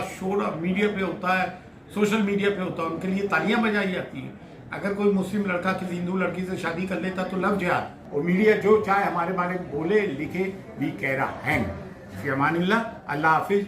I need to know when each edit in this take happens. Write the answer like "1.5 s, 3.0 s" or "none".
8.0 s

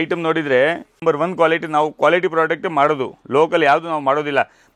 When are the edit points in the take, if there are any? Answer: 0.9 s

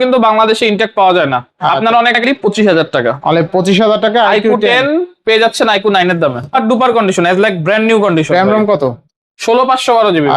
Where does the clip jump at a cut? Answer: 2.2 s, 6.5 s

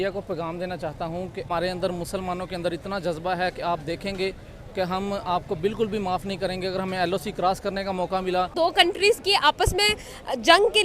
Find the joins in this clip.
1.5 s, 8.5 s

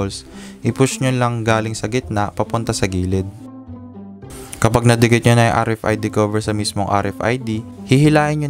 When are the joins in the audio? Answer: none

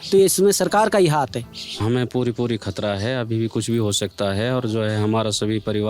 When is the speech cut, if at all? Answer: 1.8 s

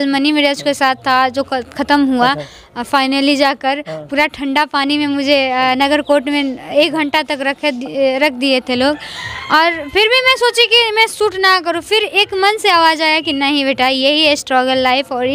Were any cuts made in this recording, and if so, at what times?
none

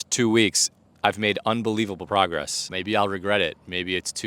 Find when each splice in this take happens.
2.6 s

